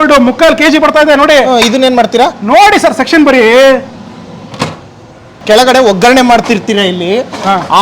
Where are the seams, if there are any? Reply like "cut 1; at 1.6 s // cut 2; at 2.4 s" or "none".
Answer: cut 1; at 5.3 s